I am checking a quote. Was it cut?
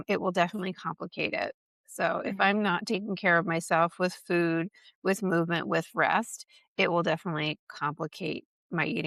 no; 0 cuts

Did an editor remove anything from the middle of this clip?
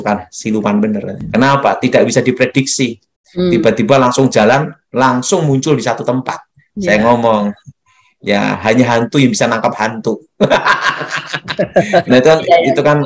yes; 1 cut; at 1.2 s

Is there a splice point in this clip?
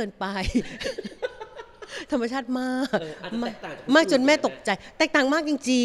no; 0 cuts

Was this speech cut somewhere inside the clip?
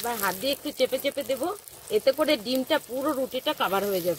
no; 0 cuts

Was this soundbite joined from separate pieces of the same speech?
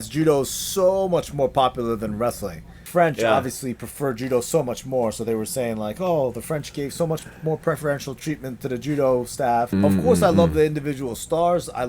yes; 2 cuts; at 2.8 s, 9.7 s

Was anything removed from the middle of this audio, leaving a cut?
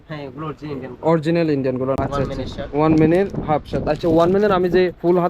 yes; 1 cut; at 2.0 s

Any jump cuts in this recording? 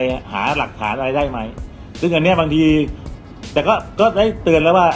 no; 0 cuts

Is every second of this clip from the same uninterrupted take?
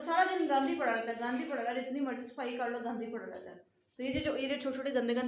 yes; 0 cuts

